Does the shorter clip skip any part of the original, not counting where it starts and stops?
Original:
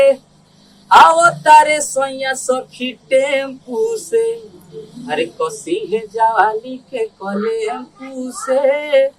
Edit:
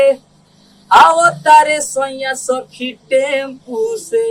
no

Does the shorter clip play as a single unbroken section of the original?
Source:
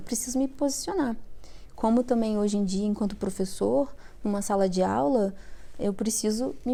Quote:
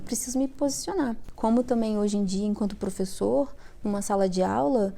no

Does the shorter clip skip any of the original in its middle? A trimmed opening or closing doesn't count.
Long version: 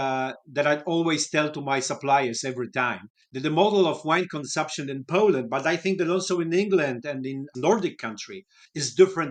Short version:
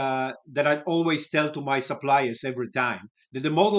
no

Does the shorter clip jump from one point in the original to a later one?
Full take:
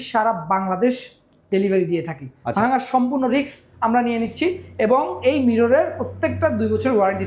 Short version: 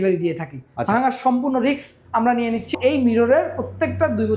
yes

